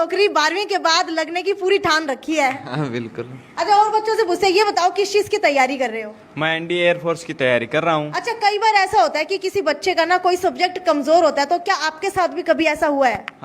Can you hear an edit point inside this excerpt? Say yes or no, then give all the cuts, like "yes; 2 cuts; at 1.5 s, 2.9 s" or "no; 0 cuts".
no; 0 cuts